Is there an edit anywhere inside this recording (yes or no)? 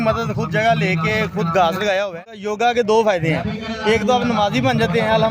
yes